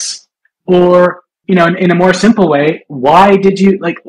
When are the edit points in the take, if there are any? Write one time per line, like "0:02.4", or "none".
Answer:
none